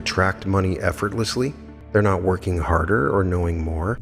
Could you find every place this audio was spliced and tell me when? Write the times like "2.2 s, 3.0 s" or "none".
1.7 s